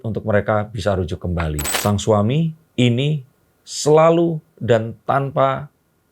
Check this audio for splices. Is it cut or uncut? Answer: cut